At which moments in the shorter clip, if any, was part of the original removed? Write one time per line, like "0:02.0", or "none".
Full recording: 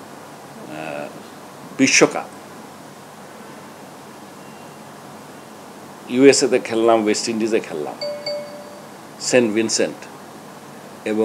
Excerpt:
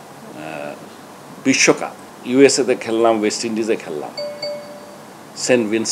0:02.1